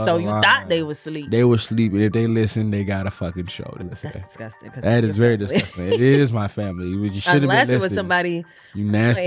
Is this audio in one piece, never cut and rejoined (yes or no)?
no